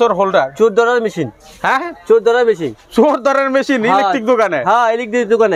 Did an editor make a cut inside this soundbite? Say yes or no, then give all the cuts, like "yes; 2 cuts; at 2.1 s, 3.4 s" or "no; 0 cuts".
no; 0 cuts